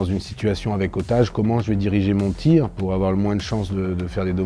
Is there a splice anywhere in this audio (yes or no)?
no